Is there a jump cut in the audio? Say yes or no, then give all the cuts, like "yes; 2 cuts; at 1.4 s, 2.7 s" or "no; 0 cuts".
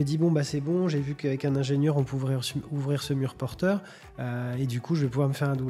no; 0 cuts